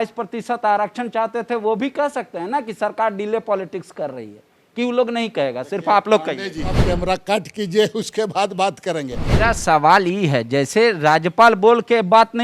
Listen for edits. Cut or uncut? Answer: cut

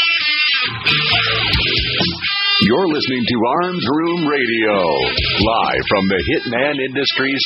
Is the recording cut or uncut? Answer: uncut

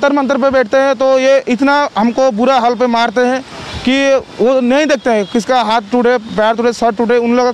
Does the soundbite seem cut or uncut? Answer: uncut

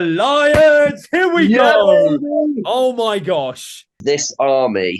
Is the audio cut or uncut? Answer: cut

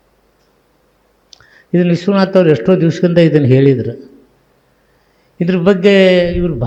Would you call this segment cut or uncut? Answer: uncut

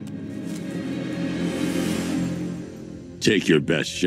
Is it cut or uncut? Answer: uncut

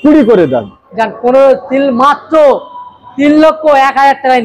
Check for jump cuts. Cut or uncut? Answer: uncut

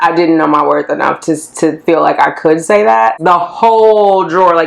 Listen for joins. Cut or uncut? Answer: cut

